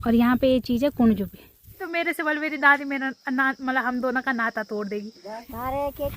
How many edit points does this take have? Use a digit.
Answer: 2